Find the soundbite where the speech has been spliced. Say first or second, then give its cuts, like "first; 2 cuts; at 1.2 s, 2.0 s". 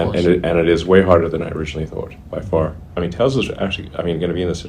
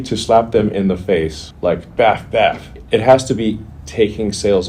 first; 1 cut; at 2.8 s